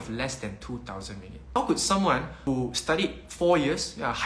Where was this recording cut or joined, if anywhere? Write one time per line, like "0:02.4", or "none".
0:01.6
0:02.5